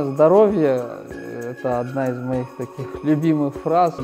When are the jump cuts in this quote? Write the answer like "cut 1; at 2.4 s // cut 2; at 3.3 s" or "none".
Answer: none

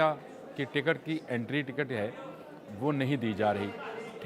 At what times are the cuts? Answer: none

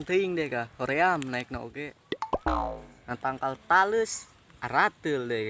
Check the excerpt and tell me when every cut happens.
cut 1; at 1.7 s // cut 2; at 3.0 s

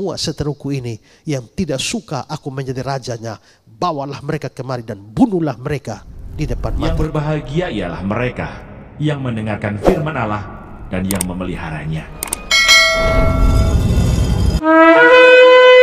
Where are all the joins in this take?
cut 1; at 6.9 s

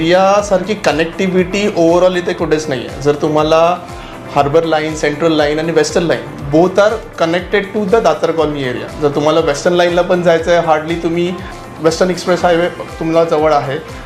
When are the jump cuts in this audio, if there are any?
none

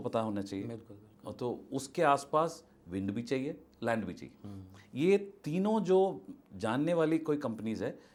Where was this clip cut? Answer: none

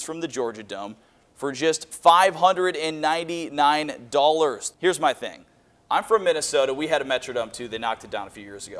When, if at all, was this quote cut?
cut 1; at 4.7 s

